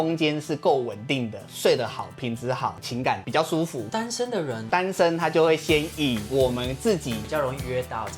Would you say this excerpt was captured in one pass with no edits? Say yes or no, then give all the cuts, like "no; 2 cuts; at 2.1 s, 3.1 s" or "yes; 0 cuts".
no; 2 cuts; at 3.2 s, 7.2 s